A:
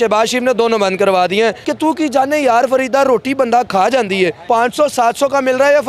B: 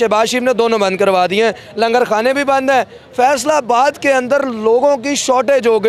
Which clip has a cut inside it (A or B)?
A